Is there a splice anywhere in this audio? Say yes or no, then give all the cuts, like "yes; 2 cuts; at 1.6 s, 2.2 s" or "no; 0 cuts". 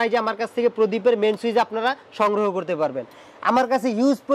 no; 0 cuts